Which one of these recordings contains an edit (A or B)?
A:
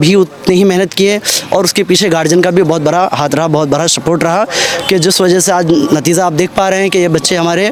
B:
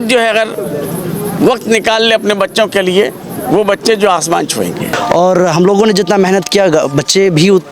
B